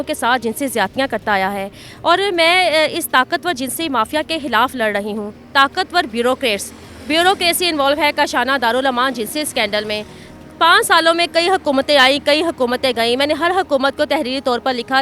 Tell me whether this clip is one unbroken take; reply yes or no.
yes